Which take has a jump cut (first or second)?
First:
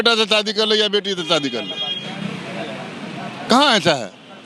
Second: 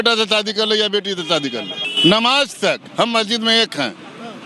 second